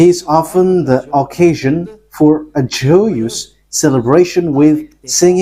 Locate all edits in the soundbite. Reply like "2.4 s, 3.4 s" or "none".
none